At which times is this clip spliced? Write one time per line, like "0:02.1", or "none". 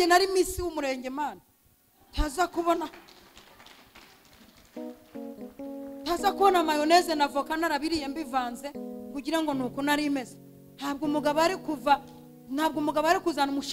none